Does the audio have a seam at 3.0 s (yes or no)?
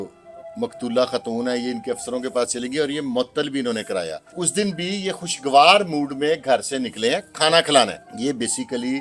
no